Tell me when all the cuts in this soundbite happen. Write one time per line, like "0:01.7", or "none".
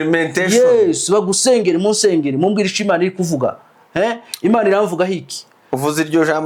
none